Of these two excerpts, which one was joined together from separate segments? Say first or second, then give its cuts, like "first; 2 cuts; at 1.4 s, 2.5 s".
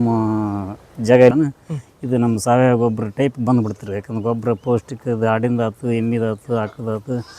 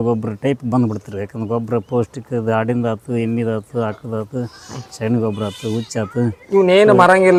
first; 1 cut; at 1.3 s